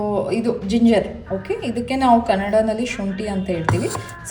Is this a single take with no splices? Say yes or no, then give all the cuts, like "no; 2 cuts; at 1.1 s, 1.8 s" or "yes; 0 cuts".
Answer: yes; 0 cuts